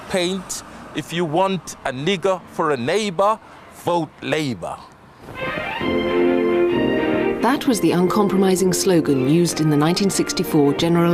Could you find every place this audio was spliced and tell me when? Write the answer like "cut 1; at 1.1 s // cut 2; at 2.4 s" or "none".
cut 1; at 4.7 s